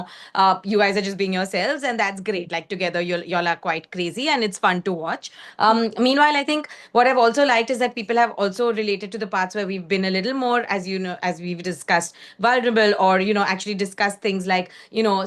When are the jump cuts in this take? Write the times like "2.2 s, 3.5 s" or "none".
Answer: none